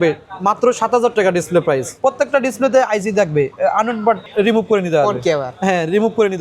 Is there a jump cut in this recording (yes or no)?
yes